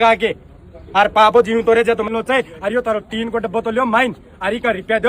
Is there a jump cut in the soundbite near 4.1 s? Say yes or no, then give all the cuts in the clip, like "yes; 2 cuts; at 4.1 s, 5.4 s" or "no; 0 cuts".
no; 1 cut; at 2.1 s